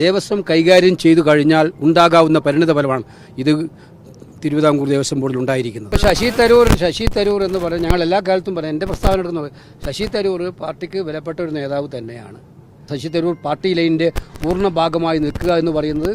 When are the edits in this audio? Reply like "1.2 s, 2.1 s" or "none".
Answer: 5.8 s, 12.9 s